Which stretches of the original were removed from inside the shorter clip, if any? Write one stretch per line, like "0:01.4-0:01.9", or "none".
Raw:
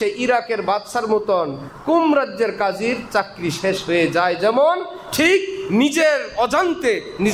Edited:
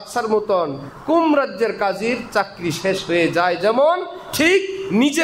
none